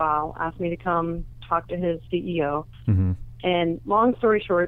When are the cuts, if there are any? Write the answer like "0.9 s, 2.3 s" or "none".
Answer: none